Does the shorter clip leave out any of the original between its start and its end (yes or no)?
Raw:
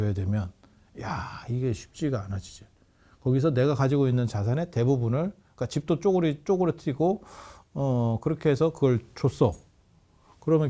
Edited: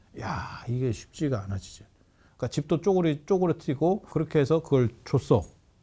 yes